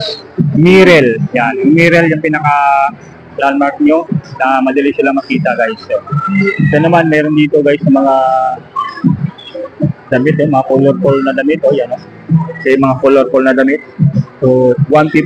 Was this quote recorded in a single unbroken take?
yes; 0 cuts

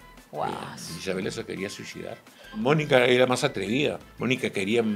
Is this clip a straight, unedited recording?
no; 2 cuts; at 2.6 s, 4.1 s

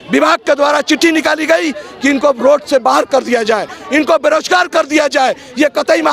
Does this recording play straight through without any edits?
yes; 0 cuts

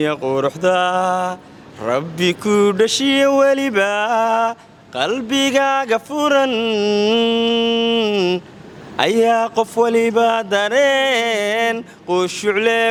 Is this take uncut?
yes; 0 cuts

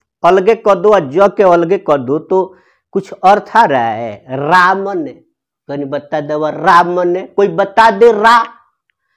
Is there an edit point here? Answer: no; 0 cuts

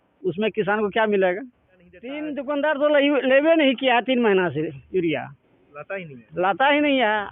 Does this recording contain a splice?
yes; 1 cut; at 2.2 s

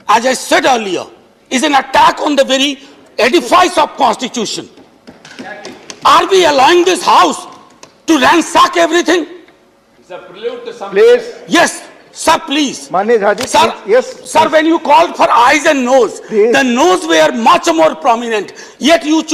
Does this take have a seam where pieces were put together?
no; 0 cuts

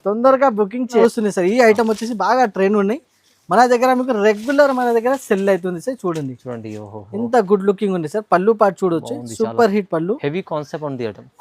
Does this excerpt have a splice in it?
yes; 1 cut; at 1.0 s

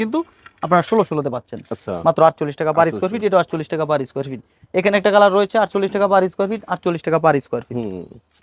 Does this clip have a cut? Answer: no; 0 cuts

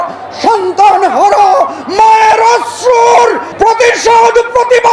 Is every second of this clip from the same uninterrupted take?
no; 1 cut; at 3.5 s

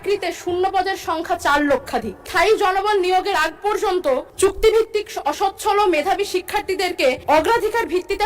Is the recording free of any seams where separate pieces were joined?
no; 3 cuts; at 2.3 s, 4.3 s, 7.2 s

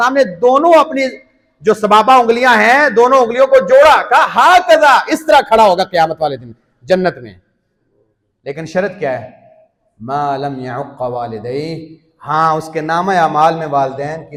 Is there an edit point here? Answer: no; 0 cuts

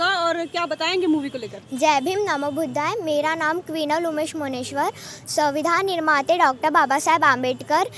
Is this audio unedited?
yes; 0 cuts

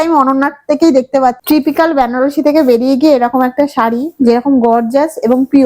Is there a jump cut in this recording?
yes; 1 cut; at 1.4 s

